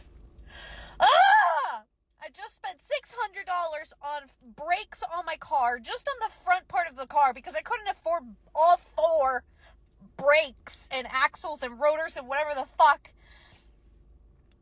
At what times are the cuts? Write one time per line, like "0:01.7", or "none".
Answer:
none